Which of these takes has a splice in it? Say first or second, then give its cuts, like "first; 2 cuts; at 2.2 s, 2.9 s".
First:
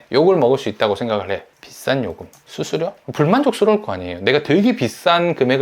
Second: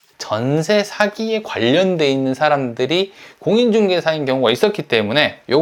first; 2 cuts; at 1.5 s, 3.0 s